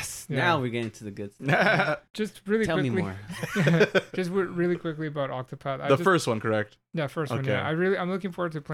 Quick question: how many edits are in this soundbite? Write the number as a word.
one